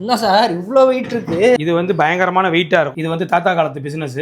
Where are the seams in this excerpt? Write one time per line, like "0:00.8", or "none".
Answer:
0:01.6
0:02.9